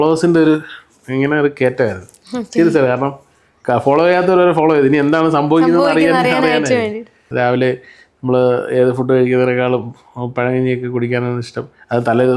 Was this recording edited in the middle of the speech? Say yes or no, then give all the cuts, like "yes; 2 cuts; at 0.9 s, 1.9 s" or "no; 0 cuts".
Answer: yes; 1 cut; at 7.2 s